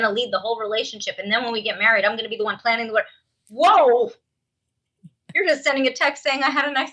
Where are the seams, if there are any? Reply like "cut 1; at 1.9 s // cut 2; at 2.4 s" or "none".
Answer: none